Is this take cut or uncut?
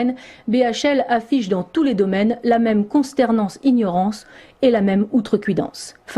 cut